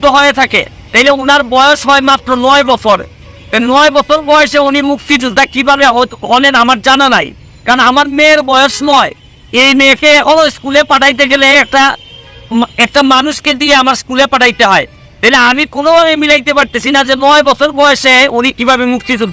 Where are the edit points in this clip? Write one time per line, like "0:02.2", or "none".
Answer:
none